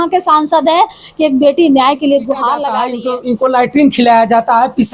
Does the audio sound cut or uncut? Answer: cut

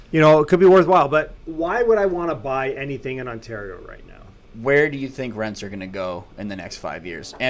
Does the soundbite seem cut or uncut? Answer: uncut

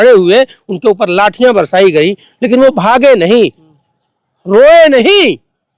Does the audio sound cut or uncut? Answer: uncut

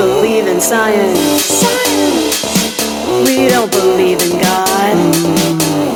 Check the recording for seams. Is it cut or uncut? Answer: uncut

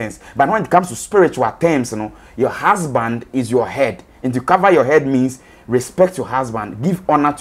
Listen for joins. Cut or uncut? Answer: uncut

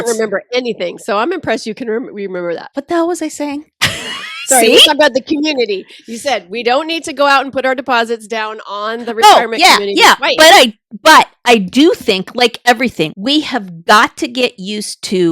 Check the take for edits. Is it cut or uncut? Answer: cut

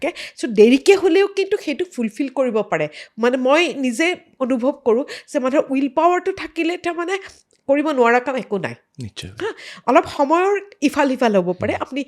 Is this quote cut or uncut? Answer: uncut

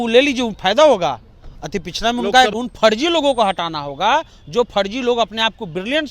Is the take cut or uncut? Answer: cut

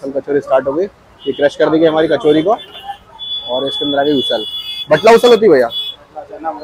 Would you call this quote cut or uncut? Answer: uncut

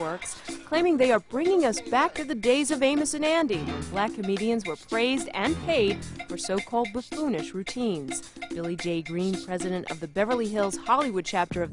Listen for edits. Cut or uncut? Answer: cut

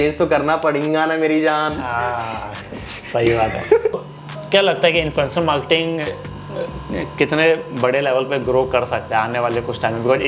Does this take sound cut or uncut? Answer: cut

